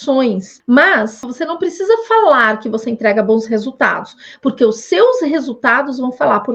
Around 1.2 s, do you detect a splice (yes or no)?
yes